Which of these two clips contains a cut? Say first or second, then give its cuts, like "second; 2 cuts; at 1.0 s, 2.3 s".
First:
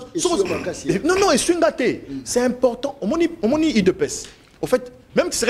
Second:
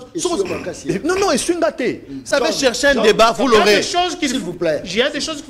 second; 1 cut; at 2.3 s